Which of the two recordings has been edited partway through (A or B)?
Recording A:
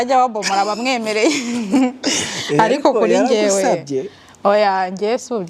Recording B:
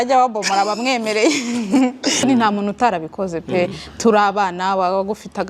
B